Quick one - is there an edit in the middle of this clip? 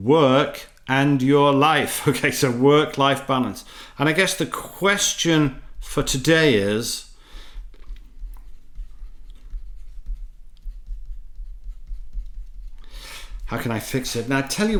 no; 0 cuts

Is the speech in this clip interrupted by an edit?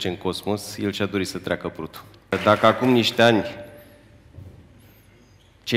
yes; 1 cut; at 2.3 s

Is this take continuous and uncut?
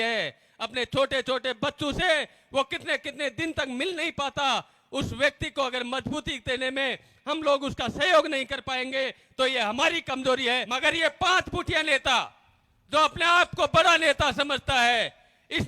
no; 1 cut; at 10.7 s

